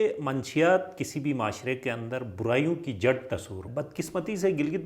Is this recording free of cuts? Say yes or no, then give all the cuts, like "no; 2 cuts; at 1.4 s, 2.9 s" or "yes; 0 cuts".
no; 1 cut; at 3.6 s